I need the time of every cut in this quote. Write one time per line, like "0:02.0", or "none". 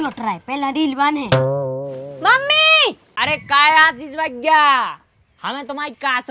0:03.1